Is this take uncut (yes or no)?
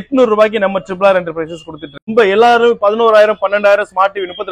no